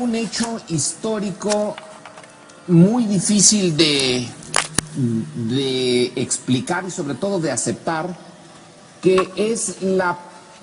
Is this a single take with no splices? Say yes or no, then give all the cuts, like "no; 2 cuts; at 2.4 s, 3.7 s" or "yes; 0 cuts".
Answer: yes; 0 cuts